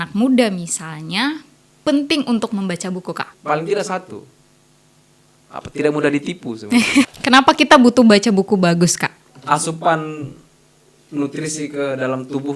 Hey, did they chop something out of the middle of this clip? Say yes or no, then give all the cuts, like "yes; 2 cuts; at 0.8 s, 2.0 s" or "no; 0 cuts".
yes; 3 cuts; at 3.3 s, 7.1 s, 9.3 s